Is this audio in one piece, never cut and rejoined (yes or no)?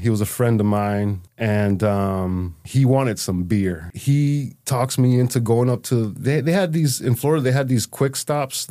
no